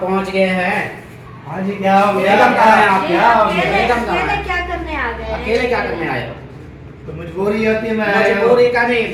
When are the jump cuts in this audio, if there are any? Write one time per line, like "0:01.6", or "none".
none